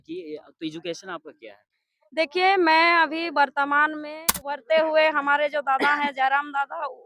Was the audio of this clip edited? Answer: yes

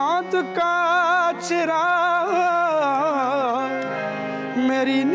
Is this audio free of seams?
yes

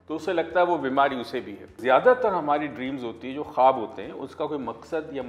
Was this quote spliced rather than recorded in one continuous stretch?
yes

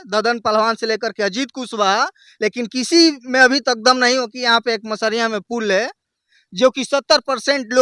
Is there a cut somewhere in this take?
no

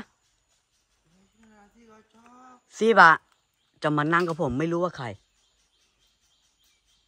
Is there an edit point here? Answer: no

